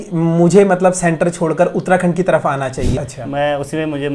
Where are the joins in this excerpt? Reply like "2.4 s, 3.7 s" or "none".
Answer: 2.9 s